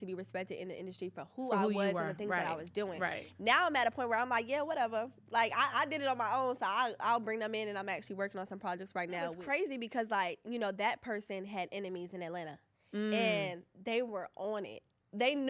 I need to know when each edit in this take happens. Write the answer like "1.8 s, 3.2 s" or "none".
9.4 s